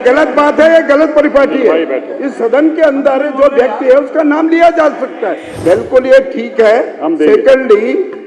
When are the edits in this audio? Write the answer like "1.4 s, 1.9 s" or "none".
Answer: 5.5 s